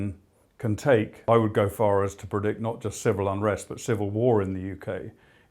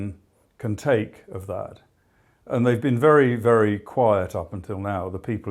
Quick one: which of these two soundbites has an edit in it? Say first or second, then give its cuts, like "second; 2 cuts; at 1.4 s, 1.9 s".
first; 1 cut; at 1.2 s